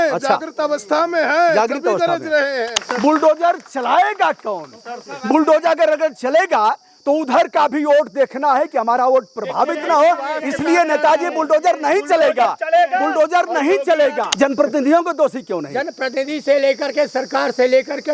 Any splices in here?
yes; 2 cuts; at 2.8 s, 14.3 s

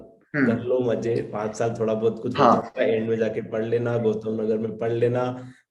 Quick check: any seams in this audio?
no; 0 cuts

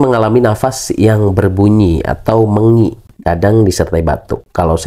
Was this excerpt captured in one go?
yes; 0 cuts

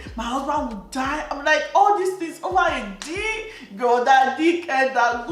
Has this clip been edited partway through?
no; 0 cuts

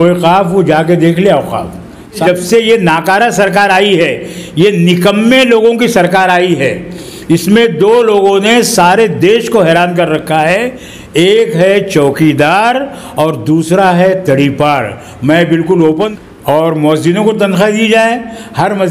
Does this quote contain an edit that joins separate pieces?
yes; 2 cuts; at 2.2 s, 16.1 s

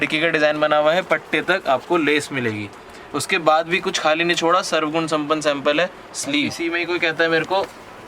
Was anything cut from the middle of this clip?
yes; 1 cut; at 6.6 s

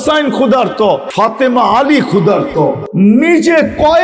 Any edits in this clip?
yes; 2 cuts; at 1.1 s, 2.8 s

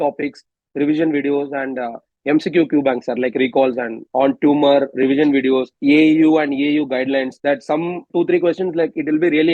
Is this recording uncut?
no; 3 cuts; at 4.0 s, 5.7 s, 7.8 s

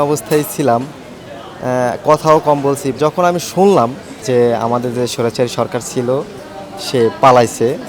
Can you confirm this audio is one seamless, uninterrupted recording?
yes; 0 cuts

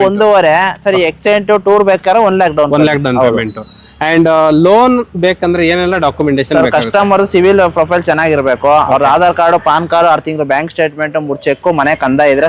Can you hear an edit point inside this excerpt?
no; 0 cuts

